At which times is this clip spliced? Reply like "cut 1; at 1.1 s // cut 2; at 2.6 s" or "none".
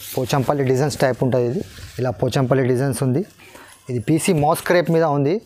none